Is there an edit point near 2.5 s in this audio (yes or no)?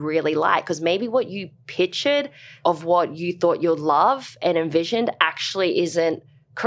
yes